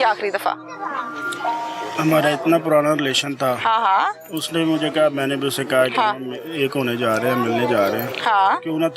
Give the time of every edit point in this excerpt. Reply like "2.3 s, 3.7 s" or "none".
none